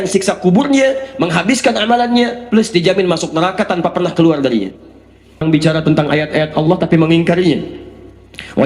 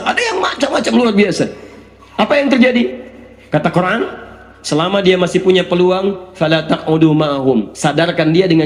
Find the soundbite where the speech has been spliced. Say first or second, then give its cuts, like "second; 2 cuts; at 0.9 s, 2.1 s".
first; 1 cut; at 5.4 s